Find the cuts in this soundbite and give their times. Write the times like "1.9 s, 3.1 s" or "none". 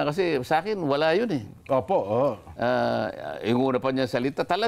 none